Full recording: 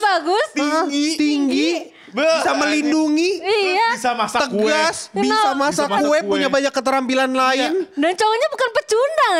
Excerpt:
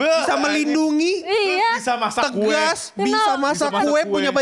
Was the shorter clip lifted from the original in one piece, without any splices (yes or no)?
yes